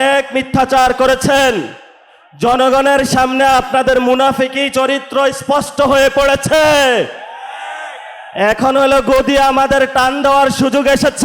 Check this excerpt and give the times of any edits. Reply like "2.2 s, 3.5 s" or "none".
none